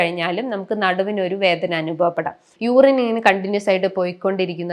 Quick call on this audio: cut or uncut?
cut